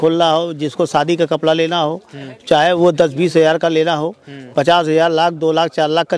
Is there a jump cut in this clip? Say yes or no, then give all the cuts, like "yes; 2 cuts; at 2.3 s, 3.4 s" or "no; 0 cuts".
no; 0 cuts